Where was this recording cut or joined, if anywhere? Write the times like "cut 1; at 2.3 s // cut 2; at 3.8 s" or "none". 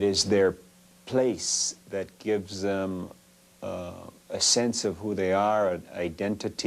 cut 1; at 1.5 s